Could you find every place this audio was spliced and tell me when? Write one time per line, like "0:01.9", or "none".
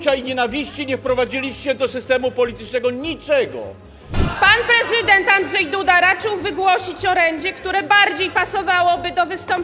0:04.1